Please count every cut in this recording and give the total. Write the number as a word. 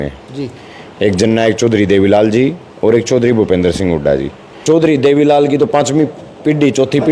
one